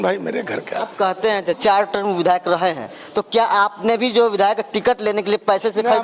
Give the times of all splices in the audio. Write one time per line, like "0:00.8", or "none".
0:01.5